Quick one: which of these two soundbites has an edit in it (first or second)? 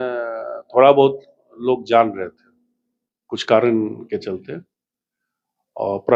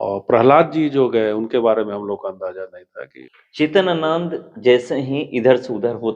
second